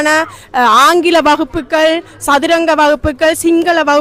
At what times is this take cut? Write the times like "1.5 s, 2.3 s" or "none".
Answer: none